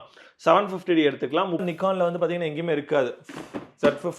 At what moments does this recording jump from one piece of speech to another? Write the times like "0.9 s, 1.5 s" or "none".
1.6 s